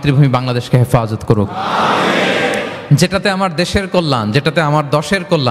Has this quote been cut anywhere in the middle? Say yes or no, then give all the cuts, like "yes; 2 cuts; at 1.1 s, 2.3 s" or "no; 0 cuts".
no; 0 cuts